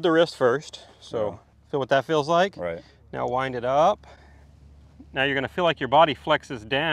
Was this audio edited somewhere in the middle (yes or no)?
no